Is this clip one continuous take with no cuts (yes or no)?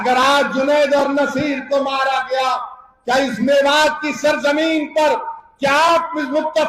yes